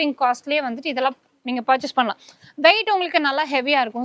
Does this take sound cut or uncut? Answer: uncut